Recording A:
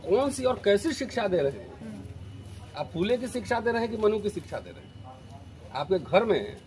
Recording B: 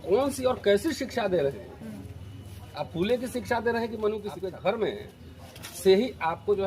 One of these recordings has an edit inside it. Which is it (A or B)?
B